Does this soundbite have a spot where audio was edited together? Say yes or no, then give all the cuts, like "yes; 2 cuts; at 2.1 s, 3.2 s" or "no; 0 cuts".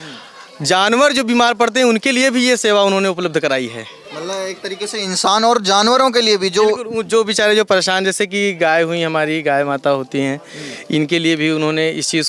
no; 0 cuts